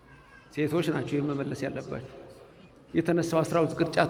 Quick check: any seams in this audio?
no; 0 cuts

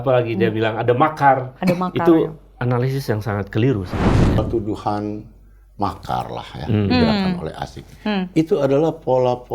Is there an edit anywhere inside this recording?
yes; 1 cut; at 4.4 s

